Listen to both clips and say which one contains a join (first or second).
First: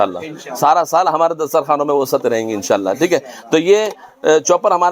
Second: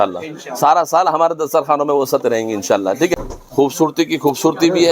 second